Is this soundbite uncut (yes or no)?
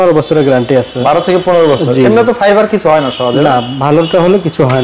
yes